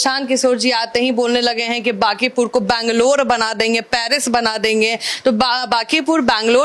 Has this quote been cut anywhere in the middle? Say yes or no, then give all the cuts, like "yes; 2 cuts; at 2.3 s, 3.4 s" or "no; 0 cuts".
no; 0 cuts